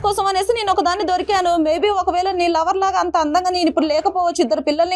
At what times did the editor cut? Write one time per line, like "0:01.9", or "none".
none